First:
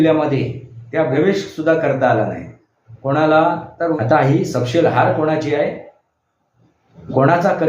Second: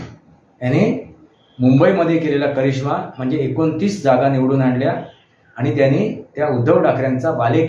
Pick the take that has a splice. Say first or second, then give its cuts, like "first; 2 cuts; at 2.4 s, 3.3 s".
first; 2 cuts; at 1.1 s, 4.0 s